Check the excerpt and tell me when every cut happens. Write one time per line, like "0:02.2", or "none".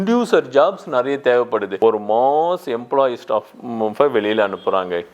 0:01.7